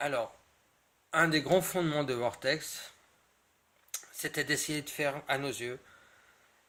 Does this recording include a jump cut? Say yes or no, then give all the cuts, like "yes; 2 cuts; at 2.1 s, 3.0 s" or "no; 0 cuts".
no; 0 cuts